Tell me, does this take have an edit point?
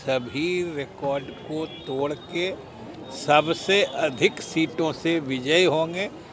no; 0 cuts

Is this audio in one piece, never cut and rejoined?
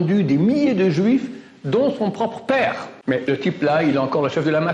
no; 1 cut; at 2.9 s

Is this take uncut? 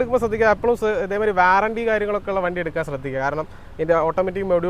yes; 0 cuts

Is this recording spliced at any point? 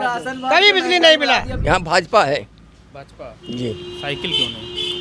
yes; 1 cut; at 1.5 s

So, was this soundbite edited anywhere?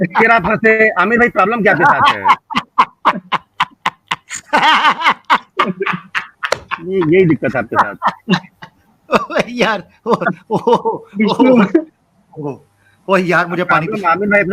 no; 0 cuts

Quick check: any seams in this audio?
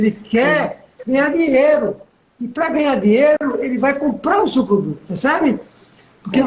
yes; 2 cuts; at 3.4 s, 5.0 s

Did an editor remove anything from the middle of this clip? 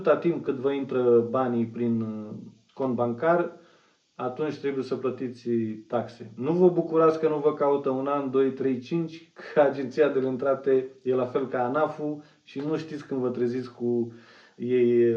no; 0 cuts

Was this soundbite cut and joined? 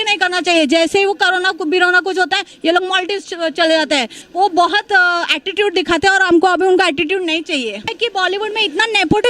yes; 2 cuts; at 4.2 s, 7.9 s

